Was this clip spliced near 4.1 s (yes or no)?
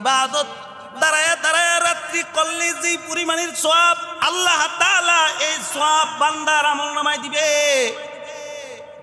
yes